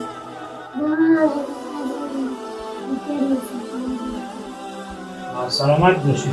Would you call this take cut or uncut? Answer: cut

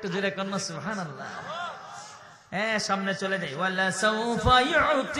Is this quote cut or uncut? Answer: uncut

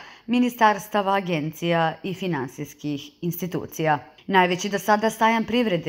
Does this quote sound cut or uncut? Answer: cut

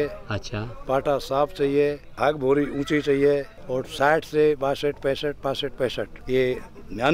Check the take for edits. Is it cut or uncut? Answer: cut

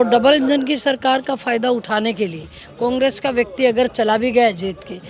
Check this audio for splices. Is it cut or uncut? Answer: uncut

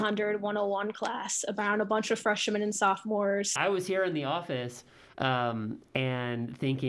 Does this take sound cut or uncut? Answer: cut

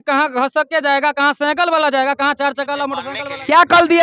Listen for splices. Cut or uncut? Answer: cut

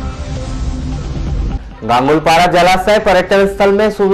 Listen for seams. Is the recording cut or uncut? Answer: cut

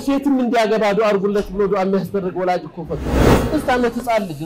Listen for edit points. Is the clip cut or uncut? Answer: cut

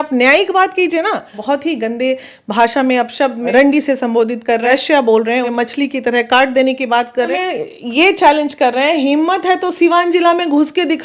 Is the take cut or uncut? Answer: cut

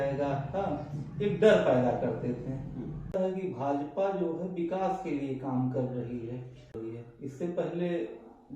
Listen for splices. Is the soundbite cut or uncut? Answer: cut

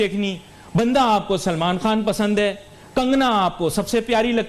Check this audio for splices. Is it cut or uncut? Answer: uncut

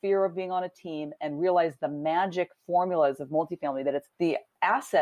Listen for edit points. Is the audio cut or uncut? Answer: uncut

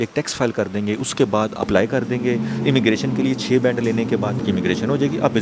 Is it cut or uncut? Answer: cut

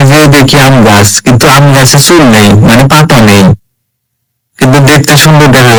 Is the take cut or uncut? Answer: uncut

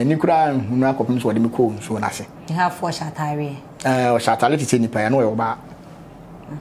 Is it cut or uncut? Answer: uncut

